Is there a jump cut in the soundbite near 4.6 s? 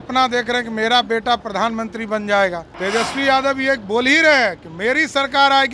no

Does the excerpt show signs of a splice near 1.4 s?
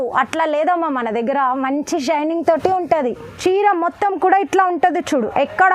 no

